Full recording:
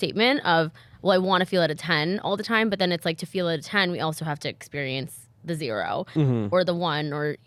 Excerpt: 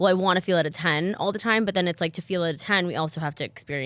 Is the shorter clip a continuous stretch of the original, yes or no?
yes